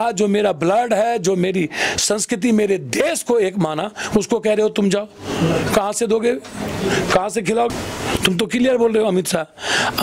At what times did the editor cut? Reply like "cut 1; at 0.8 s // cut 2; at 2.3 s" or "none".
cut 1; at 7.7 s